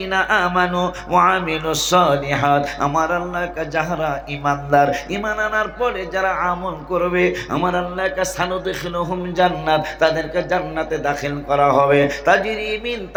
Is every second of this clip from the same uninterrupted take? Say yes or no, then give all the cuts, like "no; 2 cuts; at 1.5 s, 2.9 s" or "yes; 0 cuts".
yes; 0 cuts